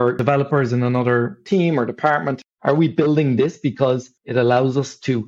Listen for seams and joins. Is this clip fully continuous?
no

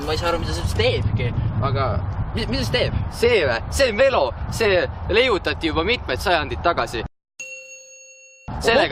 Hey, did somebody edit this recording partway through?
no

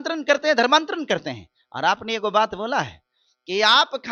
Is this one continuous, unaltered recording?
yes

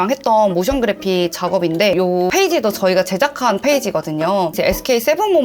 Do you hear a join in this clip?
yes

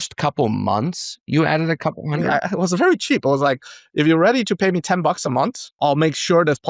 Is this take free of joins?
no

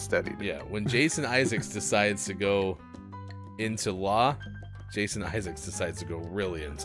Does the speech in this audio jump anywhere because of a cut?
no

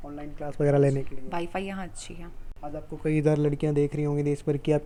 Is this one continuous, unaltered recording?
yes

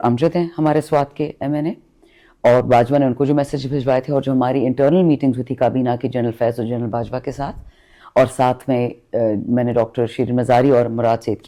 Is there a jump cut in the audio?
no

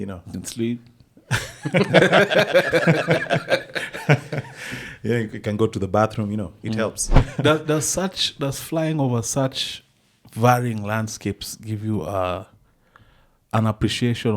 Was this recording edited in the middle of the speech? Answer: yes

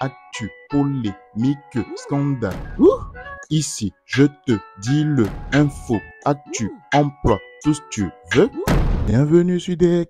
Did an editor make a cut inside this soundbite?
yes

